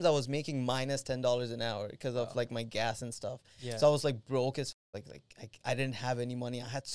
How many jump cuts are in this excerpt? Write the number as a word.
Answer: zero